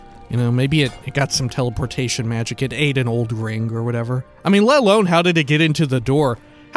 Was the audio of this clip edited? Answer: yes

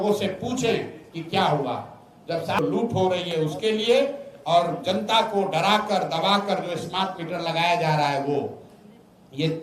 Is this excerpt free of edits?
no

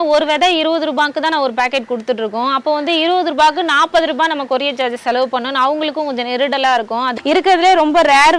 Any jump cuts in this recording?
yes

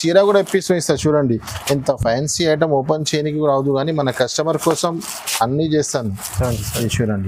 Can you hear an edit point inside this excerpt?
no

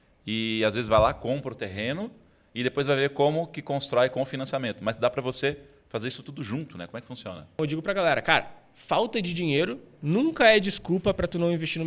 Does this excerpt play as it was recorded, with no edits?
no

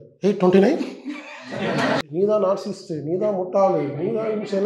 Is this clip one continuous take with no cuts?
no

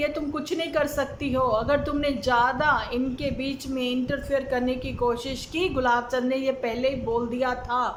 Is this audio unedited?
yes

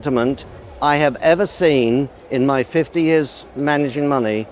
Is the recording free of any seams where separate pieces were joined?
yes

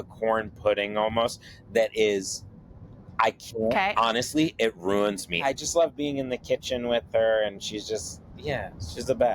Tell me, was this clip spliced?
yes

